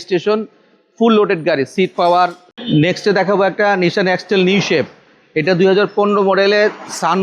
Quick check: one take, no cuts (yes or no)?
no